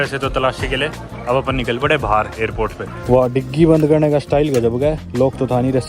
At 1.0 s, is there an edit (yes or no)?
no